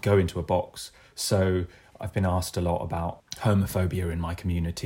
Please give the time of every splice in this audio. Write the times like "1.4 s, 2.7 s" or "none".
3.3 s